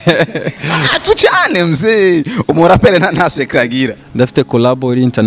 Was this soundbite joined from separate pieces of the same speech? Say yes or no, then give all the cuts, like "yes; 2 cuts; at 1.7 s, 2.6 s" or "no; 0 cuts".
no; 0 cuts